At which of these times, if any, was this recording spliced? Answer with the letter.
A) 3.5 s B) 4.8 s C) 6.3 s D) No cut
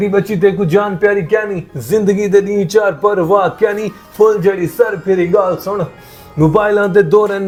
D